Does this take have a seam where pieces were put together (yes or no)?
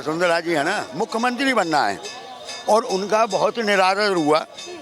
yes